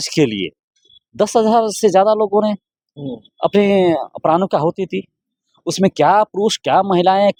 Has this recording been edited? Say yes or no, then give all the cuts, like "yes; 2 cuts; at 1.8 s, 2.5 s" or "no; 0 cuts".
no; 0 cuts